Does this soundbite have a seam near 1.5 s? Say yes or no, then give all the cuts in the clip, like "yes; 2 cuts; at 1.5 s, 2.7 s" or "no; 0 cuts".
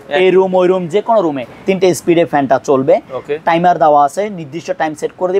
yes; 1 cut; at 1.5 s